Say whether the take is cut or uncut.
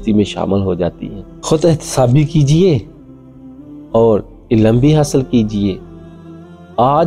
uncut